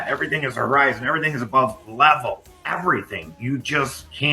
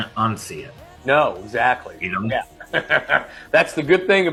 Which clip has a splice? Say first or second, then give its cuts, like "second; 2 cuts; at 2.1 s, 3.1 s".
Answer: first; 1 cut; at 2.7 s